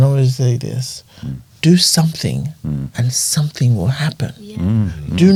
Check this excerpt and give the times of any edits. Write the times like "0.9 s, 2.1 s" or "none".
none